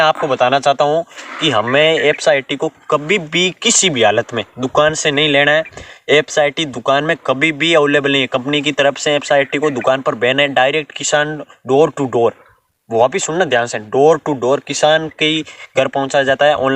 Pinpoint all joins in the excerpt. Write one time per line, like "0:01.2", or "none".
none